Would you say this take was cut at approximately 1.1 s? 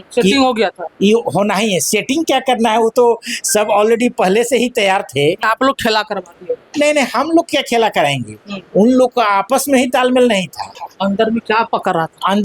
no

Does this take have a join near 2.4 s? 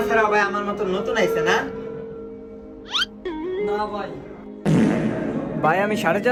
no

